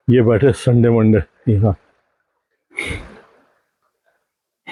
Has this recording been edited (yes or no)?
no